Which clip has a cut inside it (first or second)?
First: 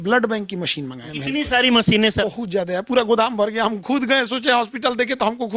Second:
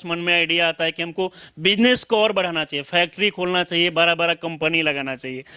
first